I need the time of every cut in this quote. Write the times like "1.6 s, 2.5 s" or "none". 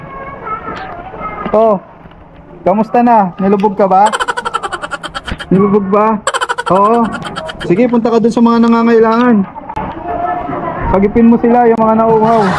none